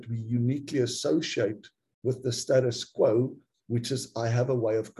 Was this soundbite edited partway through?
no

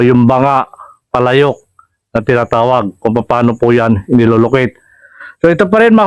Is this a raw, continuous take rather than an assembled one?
yes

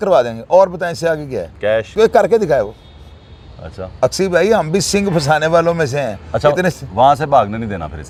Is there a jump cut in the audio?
no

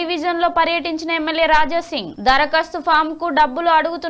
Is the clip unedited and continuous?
yes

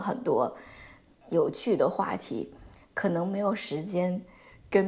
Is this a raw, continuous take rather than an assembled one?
yes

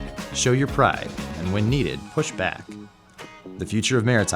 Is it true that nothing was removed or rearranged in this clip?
no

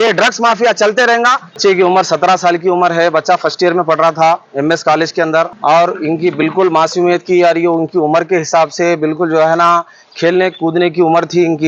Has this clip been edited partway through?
yes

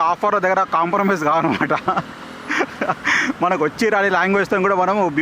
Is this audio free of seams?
yes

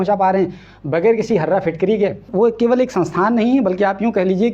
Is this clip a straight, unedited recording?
no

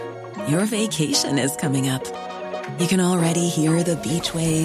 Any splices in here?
no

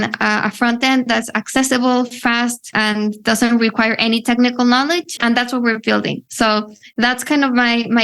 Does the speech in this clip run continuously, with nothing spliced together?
no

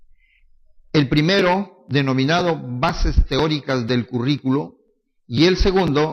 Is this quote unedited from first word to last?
yes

